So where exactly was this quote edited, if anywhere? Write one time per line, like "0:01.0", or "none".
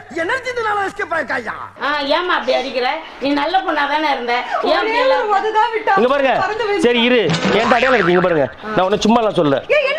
0:01.8